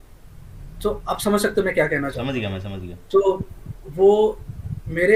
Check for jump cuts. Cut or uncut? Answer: uncut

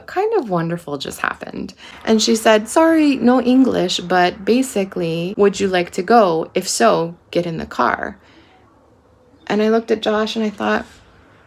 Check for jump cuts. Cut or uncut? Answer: cut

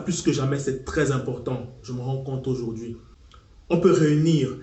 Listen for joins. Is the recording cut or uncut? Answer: uncut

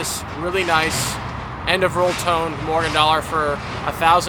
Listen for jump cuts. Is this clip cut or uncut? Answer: uncut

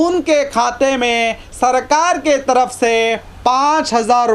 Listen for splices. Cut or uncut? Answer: uncut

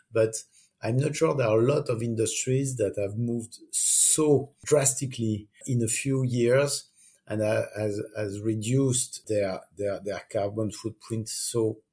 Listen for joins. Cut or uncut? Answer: cut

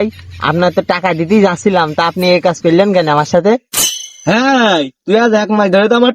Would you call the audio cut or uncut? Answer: uncut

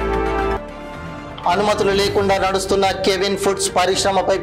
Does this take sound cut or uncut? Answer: cut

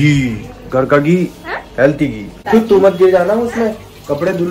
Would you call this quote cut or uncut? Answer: cut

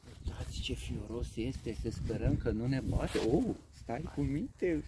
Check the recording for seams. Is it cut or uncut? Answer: uncut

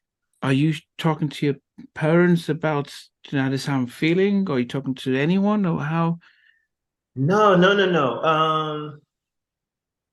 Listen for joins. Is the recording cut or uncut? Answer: uncut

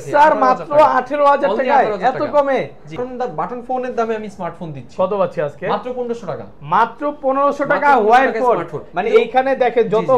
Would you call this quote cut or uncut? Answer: cut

